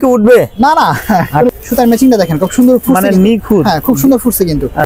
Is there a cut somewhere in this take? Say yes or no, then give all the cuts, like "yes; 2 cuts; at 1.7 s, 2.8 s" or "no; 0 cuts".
yes; 1 cut; at 1.5 s